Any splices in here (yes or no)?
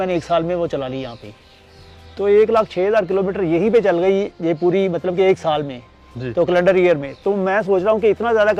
no